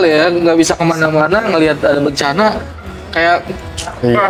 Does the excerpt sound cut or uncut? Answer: uncut